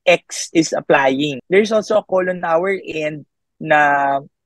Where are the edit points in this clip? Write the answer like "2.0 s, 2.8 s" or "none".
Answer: 1.4 s

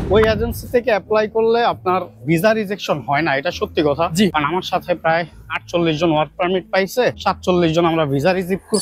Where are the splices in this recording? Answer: 4.3 s, 7.2 s

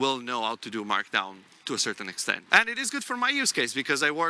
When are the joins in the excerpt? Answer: 2.4 s

